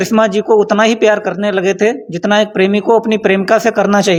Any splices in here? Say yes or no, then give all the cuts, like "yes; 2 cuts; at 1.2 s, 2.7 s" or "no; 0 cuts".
no; 0 cuts